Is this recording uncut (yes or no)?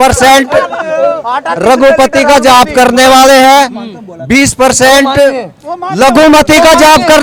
yes